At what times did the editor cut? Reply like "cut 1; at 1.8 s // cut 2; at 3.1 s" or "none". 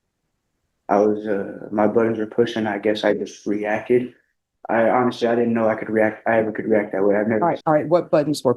cut 1; at 7.6 s